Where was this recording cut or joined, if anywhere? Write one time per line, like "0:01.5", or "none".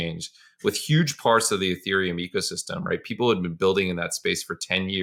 none